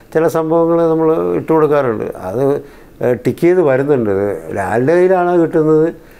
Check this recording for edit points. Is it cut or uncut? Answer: uncut